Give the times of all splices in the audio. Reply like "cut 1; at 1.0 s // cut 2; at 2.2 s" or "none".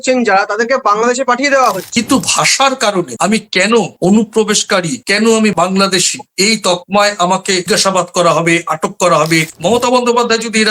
cut 1; at 1.8 s // cut 2; at 9.5 s